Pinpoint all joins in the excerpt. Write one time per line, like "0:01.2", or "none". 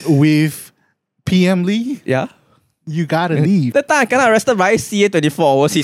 0:03.6